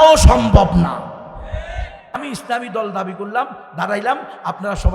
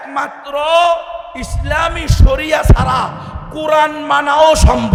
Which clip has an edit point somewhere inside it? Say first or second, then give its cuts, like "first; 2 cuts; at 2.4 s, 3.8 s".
first; 1 cut; at 2.2 s